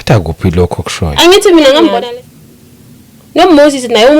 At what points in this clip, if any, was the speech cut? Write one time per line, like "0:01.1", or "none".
0:02.0